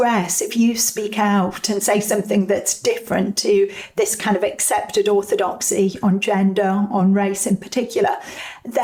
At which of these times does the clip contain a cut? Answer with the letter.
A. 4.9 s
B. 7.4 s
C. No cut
C